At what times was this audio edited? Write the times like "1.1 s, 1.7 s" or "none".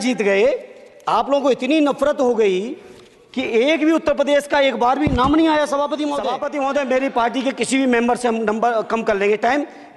6.2 s